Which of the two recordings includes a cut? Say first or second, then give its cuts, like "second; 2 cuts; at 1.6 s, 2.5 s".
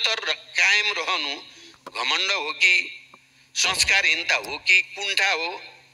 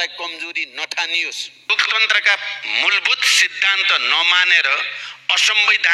second; 1 cut; at 1.7 s